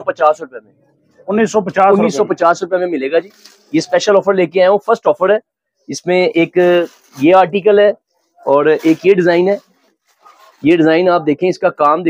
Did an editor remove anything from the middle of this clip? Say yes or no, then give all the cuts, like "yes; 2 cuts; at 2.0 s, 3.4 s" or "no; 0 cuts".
no; 0 cuts